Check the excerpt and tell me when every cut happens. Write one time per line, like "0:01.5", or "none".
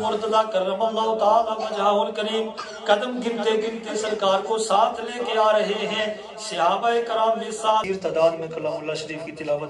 0:07.8